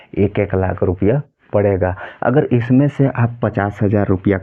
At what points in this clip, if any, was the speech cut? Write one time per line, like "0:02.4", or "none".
none